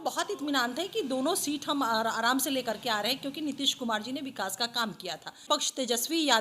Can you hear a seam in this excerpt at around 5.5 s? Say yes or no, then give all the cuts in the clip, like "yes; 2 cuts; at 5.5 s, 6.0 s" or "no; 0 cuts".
yes; 1 cut; at 5.5 s